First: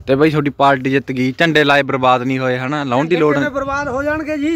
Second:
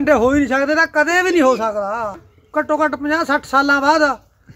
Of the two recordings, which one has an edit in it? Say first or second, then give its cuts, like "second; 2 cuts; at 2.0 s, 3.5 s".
second; 1 cut; at 2.3 s